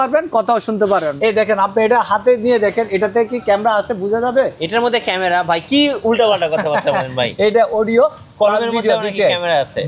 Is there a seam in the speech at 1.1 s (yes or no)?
yes